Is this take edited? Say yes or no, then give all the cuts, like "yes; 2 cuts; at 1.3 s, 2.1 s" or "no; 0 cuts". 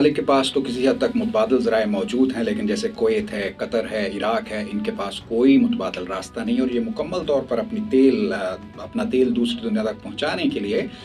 no; 0 cuts